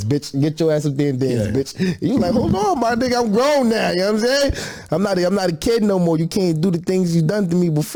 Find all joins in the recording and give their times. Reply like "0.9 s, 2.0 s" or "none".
none